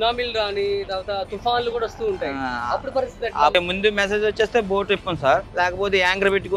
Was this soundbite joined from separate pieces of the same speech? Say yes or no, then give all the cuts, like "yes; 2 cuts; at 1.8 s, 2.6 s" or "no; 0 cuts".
yes; 2 cuts; at 3.5 s, 5.5 s